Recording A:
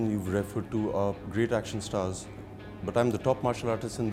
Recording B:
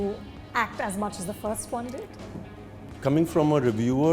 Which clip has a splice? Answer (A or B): B